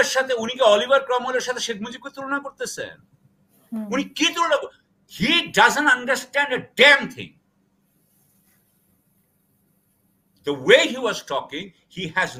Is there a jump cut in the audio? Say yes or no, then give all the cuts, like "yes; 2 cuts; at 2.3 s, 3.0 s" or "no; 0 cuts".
no; 0 cuts